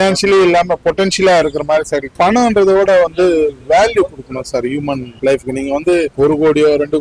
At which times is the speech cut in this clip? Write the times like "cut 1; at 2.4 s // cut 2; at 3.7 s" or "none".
cut 1; at 2.1 s // cut 2; at 5.1 s // cut 3; at 6.1 s